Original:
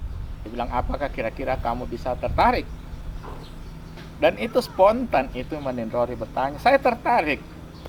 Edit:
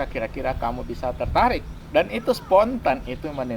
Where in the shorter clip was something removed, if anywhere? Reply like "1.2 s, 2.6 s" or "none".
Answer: 1.8 s